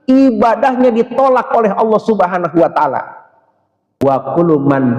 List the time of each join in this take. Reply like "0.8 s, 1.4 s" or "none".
4.0 s